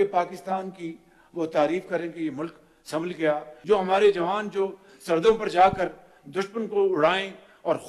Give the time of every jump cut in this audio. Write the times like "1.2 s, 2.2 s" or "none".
3.5 s